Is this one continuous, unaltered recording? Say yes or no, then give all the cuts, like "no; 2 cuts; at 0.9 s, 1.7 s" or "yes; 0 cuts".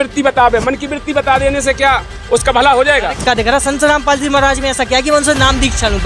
no; 1 cut; at 3.2 s